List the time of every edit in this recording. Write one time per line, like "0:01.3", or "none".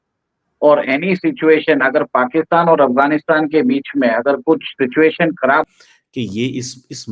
0:05.6